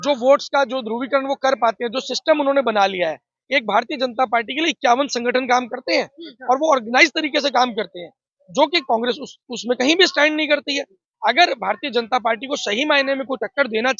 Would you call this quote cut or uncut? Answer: uncut